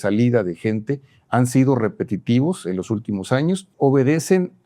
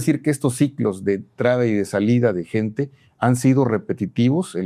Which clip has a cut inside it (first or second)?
first